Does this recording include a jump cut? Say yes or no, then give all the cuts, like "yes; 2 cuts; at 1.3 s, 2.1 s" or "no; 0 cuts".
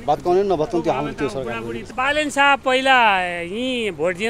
yes; 1 cut; at 1.9 s